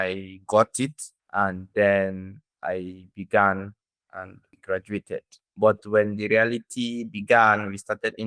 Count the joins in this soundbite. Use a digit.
1